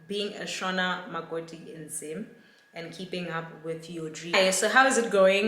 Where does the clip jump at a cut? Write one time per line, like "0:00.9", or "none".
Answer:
0:04.3

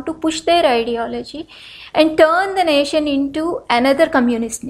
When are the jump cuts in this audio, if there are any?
none

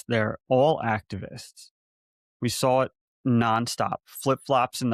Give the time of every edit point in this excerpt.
none

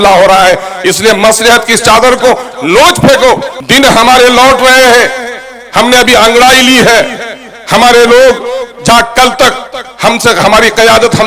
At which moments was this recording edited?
0:03.5

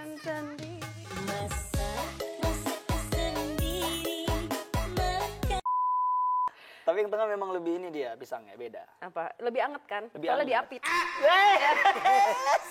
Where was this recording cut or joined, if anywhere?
0:06.5

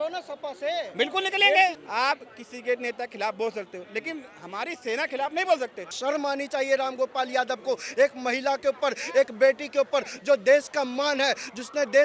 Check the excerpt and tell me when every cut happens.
0:01.8
0:05.9

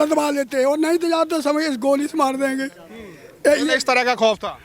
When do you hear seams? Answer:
none

